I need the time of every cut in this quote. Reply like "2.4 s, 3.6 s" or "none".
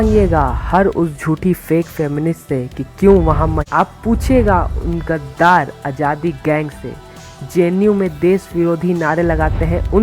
3.6 s

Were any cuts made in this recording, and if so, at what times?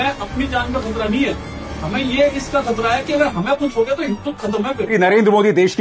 4.9 s

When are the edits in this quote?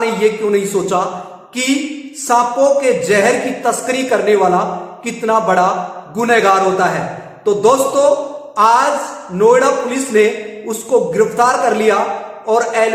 none

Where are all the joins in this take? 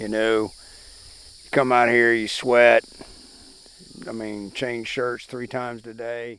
none

